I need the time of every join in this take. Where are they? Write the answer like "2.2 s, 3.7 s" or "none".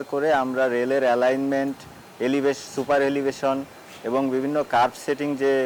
none